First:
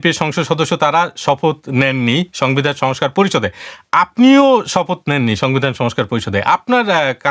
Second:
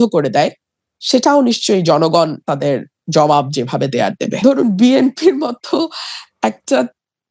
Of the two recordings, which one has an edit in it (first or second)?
second